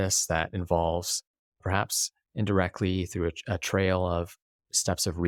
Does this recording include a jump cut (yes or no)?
no